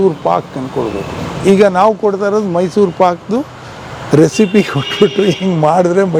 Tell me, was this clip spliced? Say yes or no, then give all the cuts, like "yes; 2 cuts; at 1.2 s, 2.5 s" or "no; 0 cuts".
no; 0 cuts